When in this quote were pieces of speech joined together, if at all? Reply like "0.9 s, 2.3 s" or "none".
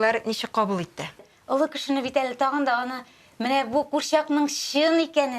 1.3 s